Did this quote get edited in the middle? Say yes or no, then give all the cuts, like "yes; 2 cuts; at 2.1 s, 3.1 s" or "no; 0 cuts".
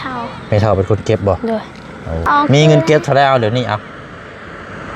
yes; 1 cut; at 2.3 s